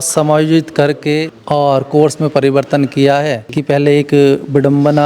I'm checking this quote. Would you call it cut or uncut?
cut